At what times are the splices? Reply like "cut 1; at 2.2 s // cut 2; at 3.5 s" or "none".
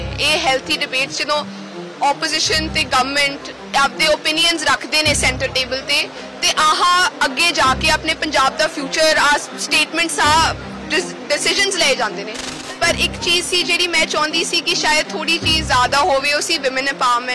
cut 1; at 12.5 s